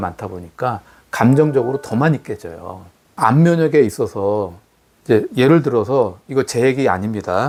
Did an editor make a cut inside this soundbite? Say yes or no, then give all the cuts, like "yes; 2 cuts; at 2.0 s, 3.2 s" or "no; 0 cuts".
no; 0 cuts